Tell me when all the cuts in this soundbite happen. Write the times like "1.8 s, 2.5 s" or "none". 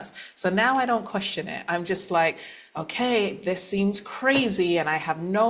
none